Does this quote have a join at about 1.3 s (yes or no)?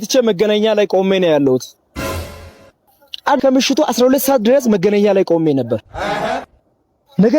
no